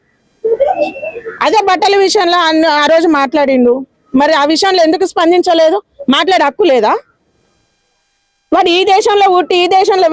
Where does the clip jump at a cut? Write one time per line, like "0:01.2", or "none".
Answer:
none